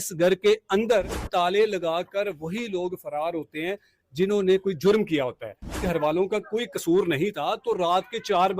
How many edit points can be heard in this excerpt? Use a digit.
2